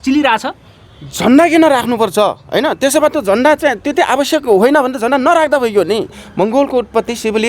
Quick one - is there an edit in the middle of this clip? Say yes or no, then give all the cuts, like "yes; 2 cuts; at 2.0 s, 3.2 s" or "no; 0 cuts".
yes; 1 cut; at 6.1 s